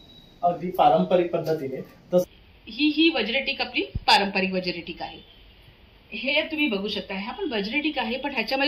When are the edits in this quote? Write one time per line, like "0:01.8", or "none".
0:02.3